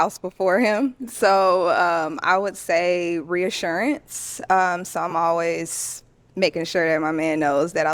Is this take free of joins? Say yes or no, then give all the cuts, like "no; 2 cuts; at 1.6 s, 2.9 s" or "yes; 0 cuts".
yes; 0 cuts